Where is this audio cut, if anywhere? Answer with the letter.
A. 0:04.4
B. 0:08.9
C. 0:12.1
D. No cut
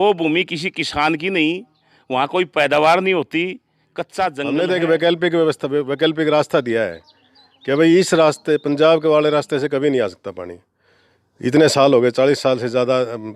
A